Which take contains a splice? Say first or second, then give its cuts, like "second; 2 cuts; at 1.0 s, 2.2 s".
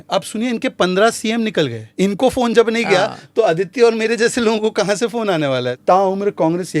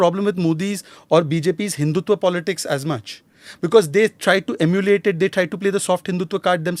first; 2 cuts; at 1.8 s, 5.7 s